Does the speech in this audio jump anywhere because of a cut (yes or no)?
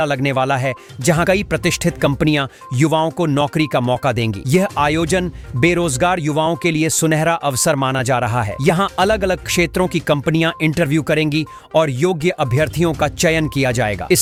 no